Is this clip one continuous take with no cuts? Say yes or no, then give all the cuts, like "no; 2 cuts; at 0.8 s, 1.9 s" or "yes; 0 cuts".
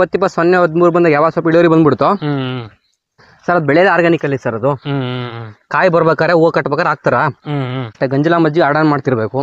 no; 1 cut; at 7.9 s